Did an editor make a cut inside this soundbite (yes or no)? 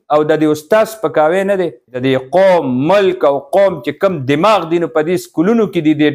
yes